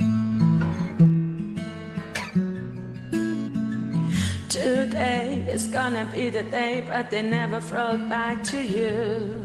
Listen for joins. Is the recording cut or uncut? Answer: uncut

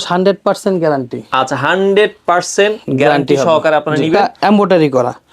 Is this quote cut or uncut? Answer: cut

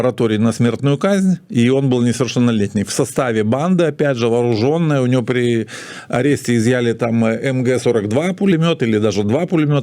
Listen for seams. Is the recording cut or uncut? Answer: uncut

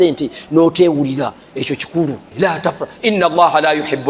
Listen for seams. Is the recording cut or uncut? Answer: cut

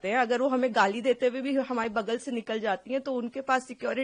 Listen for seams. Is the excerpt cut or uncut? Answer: uncut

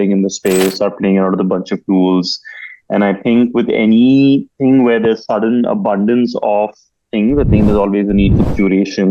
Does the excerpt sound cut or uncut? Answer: uncut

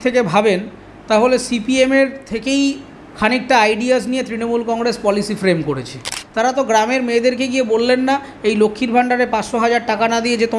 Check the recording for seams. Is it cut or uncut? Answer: cut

